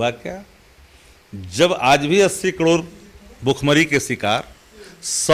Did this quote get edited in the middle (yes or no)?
no